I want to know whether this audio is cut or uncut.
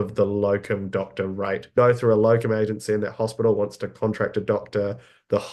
cut